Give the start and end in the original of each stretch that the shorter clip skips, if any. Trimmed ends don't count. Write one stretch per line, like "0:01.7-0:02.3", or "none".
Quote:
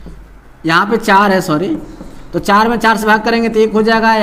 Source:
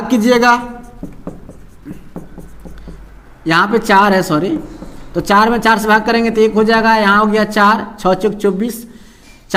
none